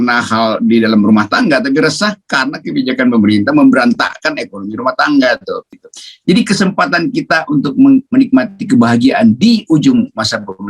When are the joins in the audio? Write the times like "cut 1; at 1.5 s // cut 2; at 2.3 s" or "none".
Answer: cut 1; at 5.8 s